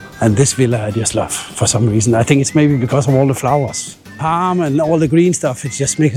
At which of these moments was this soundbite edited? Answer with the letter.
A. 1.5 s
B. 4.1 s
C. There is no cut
C